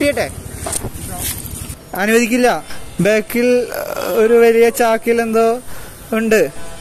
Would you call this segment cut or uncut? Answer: cut